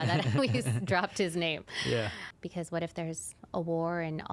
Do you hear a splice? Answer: yes; 1 cut; at 2.2 s

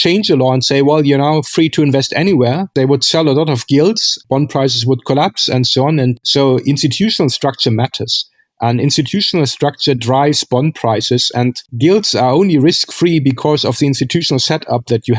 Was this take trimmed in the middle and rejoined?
yes; 3 cuts; at 2.7 s, 4.2 s, 6.2 s

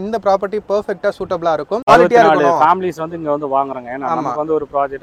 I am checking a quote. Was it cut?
yes; 1 cut; at 1.9 s

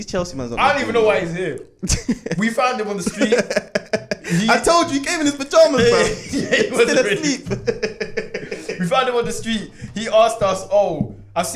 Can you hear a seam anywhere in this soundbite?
no; 0 cuts

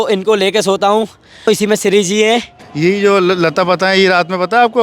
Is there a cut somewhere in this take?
yes; 2 cuts; at 1.5 s, 2.6 s

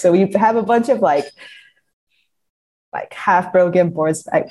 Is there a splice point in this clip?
no; 0 cuts

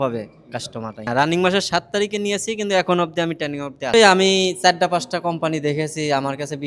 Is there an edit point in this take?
yes; 2 cuts; at 1.0 s, 3.9 s

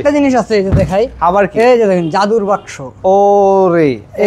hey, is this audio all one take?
yes; 0 cuts

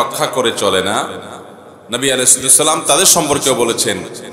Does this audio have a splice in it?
no; 0 cuts

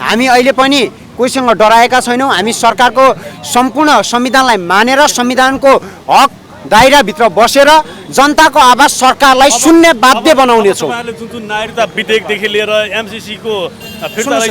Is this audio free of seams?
yes; 0 cuts

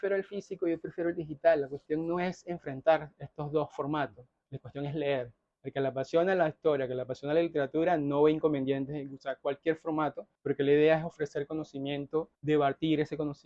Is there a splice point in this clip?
yes; 2 cuts; at 10.3 s, 12.3 s

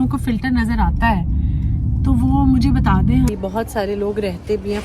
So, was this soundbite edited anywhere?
yes; 1 cut; at 3.3 s

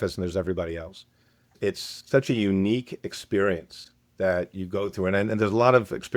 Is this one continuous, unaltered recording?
no; 1 cut; at 1.5 s

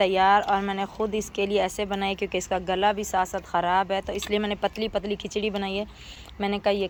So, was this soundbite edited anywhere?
no; 0 cuts

